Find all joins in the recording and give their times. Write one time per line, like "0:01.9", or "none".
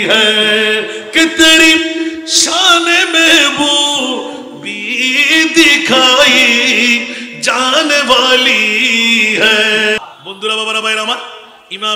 0:10.0